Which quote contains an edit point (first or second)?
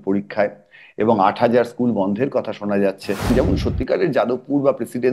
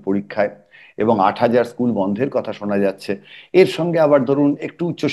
first